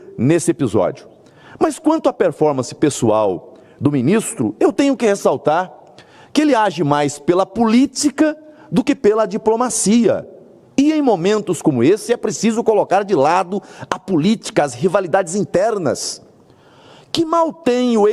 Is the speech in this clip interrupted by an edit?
no; 0 cuts

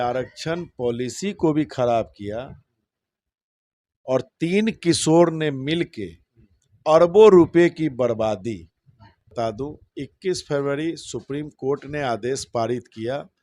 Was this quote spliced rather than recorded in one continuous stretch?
yes; 1 cut; at 9.3 s

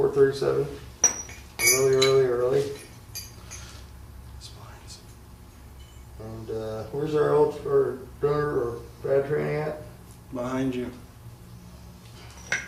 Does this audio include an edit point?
no; 0 cuts

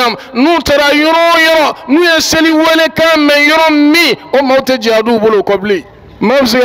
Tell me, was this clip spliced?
no; 0 cuts

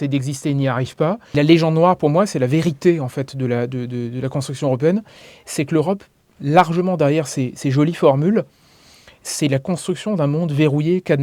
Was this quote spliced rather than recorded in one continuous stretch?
yes; 1 cut; at 1.2 s

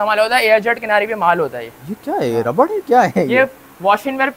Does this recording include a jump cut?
no; 0 cuts

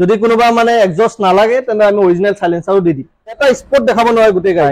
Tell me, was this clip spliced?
yes; 1 cut; at 3.4 s

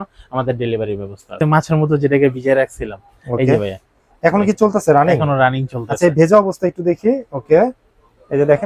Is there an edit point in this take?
yes; 1 cut; at 1.4 s

